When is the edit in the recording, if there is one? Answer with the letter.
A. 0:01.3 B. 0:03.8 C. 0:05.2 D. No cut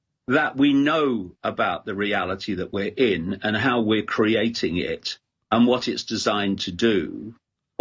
D